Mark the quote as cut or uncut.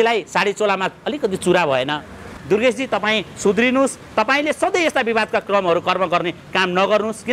cut